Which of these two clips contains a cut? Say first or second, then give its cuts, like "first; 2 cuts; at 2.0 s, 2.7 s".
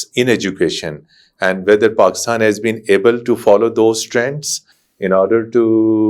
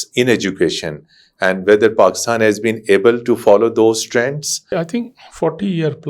second; 1 cut; at 4.7 s